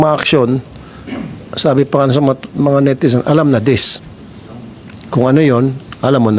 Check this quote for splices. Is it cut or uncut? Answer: uncut